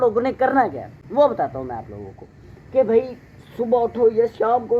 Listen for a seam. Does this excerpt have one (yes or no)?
no